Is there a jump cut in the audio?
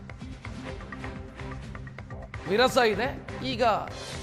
yes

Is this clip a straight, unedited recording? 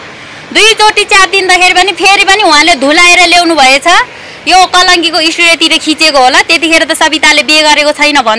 yes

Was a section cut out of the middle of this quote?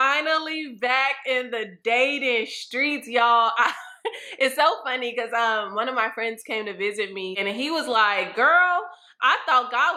no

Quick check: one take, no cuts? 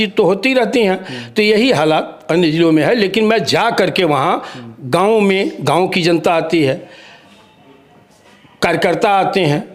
yes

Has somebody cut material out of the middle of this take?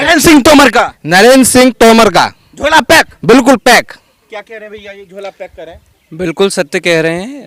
no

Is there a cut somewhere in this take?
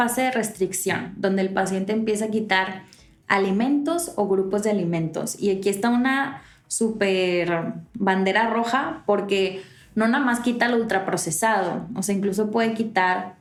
no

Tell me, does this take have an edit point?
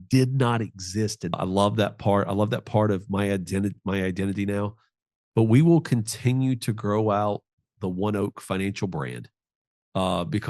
yes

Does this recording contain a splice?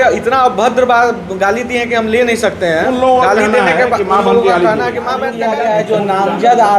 yes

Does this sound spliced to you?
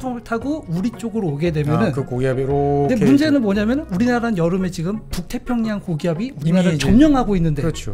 no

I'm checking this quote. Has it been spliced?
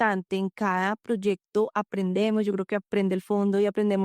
no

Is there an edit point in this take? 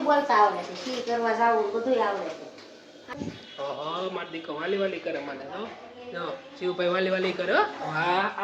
yes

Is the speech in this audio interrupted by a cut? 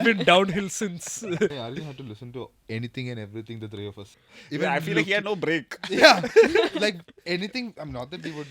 yes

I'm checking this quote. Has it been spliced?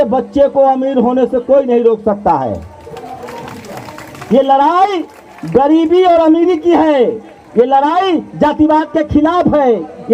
no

